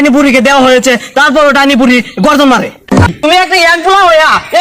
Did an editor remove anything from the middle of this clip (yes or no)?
yes